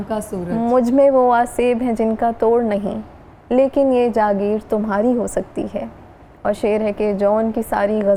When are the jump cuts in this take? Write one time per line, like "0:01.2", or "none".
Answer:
none